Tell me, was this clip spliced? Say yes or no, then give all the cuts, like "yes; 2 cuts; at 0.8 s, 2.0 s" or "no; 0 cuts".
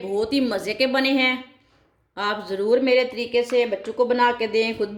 no; 0 cuts